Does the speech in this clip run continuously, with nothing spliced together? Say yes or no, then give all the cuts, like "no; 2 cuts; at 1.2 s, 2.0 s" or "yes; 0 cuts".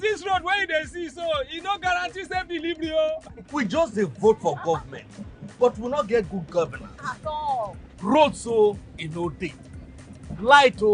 no; 1 cut; at 3.3 s